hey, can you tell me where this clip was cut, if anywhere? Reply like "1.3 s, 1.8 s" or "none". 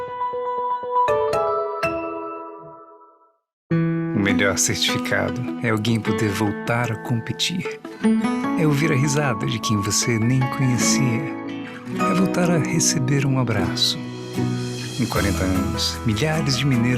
3.7 s